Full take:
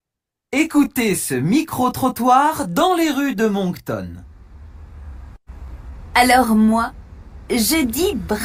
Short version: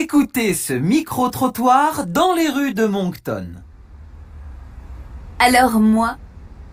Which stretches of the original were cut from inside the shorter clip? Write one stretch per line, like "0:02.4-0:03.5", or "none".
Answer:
0:05.7-0:05.9